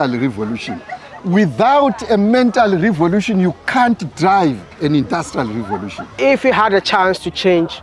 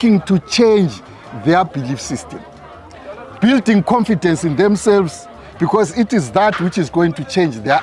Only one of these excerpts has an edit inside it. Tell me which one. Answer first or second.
first